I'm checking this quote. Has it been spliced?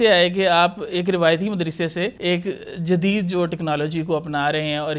yes; 1 cut; at 2.2 s

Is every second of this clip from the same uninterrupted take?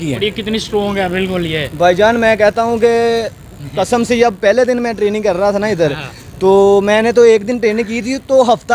yes; 0 cuts

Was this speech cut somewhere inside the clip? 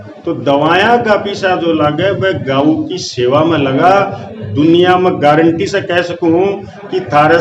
no; 0 cuts

